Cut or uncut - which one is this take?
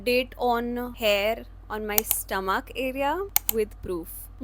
cut